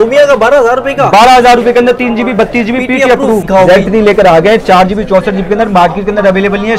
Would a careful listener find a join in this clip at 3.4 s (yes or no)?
yes